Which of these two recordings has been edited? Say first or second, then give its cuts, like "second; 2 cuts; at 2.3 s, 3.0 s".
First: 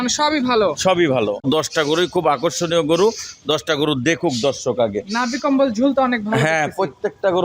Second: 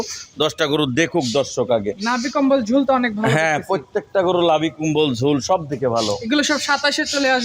first; 1 cut; at 1.5 s